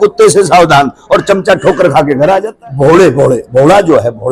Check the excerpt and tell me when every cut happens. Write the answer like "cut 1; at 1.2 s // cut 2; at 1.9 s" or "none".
cut 1; at 2.5 s